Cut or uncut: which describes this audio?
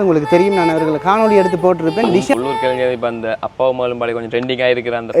cut